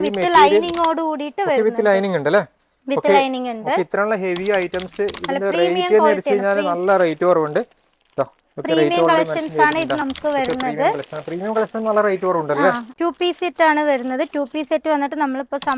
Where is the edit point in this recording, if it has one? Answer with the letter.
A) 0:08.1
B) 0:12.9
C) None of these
B